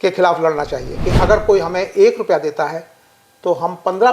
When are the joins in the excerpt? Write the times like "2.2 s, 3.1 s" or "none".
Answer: 1.0 s